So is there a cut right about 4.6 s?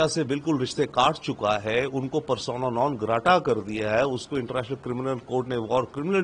no; 0 cuts

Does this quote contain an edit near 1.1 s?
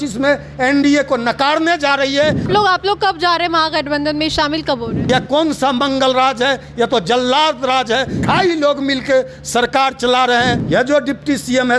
no; 4 cuts; at 2.4 s, 5.0 s, 8.1 s, 10.6 s

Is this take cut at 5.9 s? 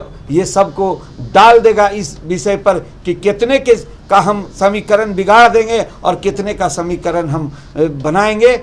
no; 0 cuts

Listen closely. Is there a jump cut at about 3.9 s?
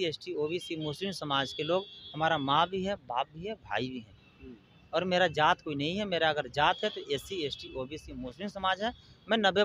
no; 0 cuts

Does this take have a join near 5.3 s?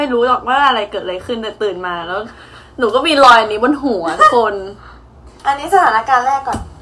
yes; 1 cut; at 5.3 s

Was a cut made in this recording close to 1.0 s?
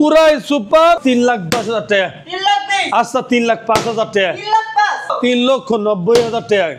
yes; 2 cuts; at 1.0 s, 5.1 s

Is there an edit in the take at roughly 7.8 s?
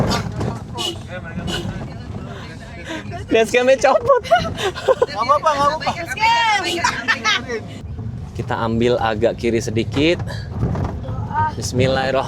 yes; 1 cut; at 7.8 s

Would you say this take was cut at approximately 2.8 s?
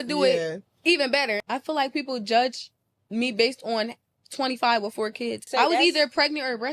no; 2 cuts; at 1.4 s, 5.5 s

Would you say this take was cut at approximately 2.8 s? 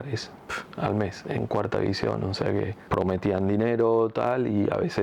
yes; 1 cut; at 2.8 s

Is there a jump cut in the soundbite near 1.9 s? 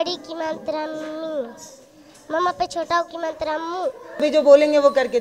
no; 1 cut; at 4.2 s

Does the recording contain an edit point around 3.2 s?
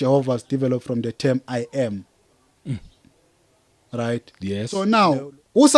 no; 1 cut; at 4.8 s

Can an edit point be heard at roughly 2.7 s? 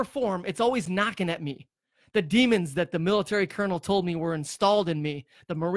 no; 0 cuts

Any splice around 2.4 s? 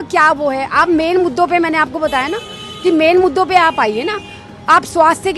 no; 0 cuts

